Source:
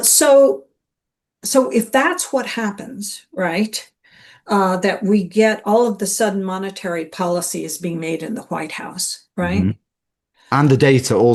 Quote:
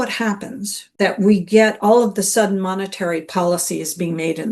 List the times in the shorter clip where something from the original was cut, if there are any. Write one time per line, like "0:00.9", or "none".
0:01.0